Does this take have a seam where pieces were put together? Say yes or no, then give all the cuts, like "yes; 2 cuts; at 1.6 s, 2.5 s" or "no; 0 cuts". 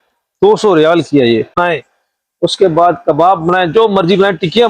yes; 1 cut; at 1.6 s